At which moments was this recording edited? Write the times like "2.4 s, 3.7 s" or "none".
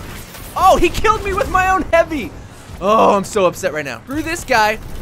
4.0 s